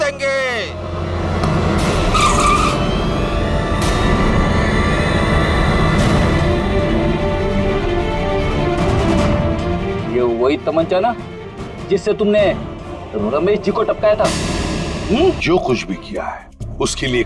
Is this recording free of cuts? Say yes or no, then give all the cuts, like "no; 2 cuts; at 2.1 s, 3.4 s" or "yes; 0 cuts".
no; 1 cut; at 15.4 s